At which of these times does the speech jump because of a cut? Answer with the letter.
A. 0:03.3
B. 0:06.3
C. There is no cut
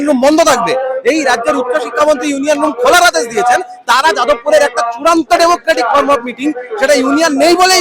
C